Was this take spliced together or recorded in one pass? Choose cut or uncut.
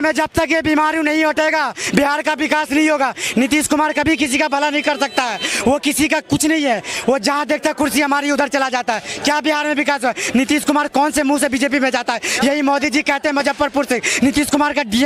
uncut